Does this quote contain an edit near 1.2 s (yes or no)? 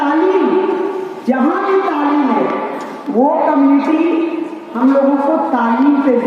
no